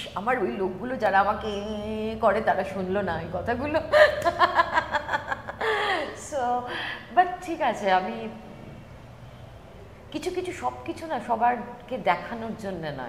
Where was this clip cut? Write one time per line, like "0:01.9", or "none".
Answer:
none